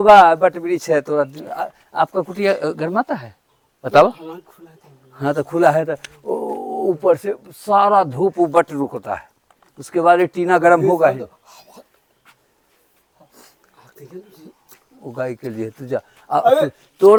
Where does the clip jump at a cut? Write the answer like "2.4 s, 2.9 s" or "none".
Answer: none